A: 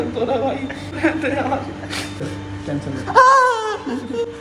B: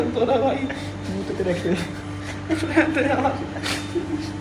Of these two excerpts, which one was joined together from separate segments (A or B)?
A